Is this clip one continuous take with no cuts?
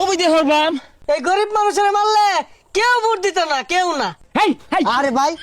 no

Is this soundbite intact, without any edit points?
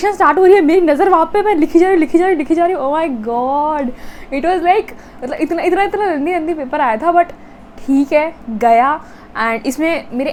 yes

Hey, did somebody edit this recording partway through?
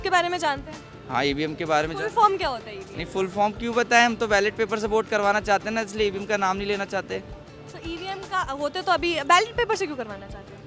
no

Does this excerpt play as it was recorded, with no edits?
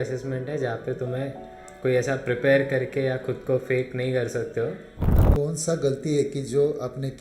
no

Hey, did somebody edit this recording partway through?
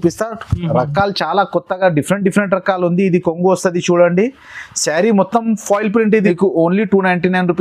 yes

